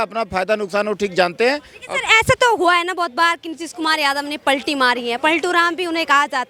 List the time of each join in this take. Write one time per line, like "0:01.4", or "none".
none